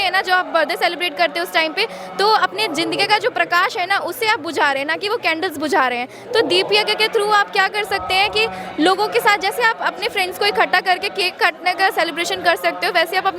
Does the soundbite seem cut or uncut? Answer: uncut